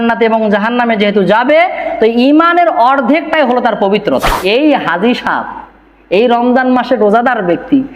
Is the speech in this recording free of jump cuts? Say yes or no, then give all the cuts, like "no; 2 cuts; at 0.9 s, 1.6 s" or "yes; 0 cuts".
no; 1 cut; at 4.4 s